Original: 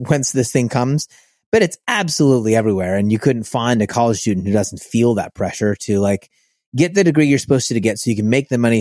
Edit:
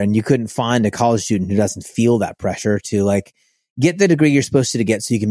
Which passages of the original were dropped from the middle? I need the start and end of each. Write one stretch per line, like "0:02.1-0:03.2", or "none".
none